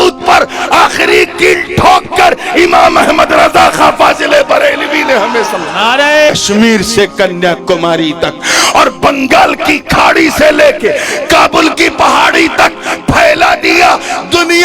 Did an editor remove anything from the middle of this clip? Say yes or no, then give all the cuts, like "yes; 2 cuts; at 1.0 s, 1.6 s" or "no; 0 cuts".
yes; 1 cut; at 6.3 s